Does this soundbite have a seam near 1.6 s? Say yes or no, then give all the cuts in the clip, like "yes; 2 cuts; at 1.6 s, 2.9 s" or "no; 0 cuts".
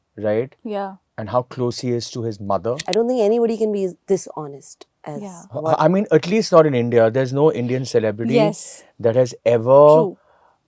no; 1 cut; at 2.8 s